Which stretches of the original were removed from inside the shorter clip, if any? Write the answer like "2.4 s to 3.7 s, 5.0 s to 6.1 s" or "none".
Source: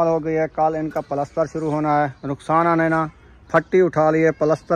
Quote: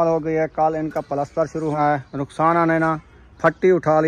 1.8 s to 1.8 s

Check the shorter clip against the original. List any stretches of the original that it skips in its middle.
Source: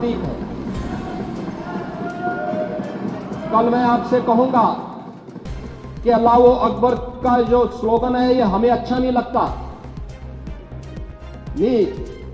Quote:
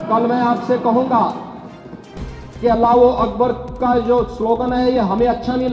none

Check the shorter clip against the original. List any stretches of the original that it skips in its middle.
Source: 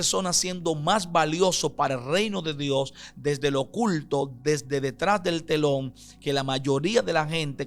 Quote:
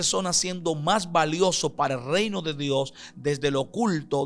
none

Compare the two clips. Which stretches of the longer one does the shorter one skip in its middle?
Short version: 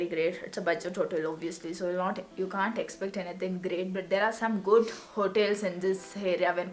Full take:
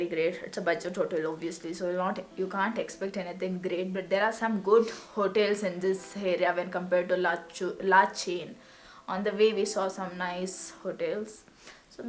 none

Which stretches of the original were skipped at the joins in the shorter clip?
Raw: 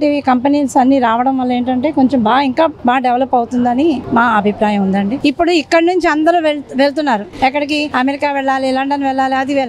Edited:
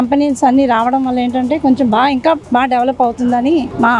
none

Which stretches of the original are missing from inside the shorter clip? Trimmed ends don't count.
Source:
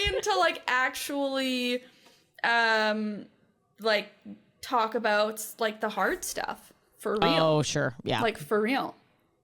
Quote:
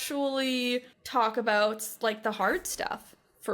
2.0 s to 4.5 s

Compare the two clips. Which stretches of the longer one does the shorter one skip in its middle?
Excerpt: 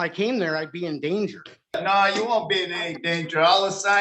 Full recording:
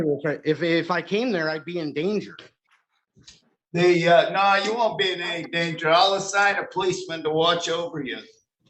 2.7 s to 4.3 s

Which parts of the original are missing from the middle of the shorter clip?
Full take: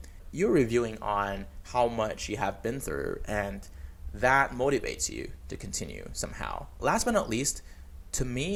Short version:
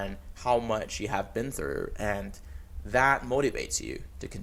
none

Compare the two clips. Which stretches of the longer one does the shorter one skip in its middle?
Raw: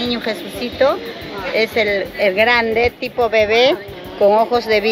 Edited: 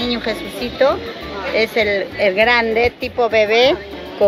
none

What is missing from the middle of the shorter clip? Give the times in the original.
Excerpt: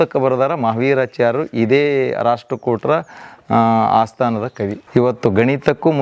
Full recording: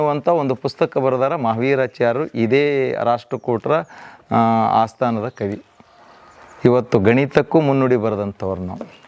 5.6 s to 6.5 s

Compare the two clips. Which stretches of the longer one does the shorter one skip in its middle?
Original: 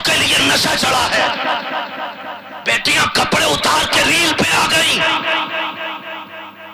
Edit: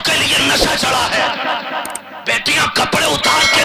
1.9 s to 2.3 s

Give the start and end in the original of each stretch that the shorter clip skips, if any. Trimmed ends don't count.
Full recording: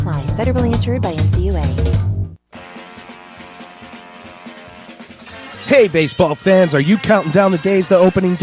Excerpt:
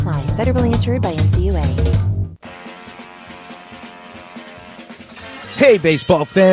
2.4 s to 2.5 s

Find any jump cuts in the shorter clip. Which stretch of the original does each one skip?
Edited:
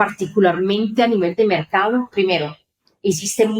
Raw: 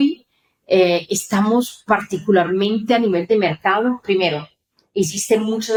none

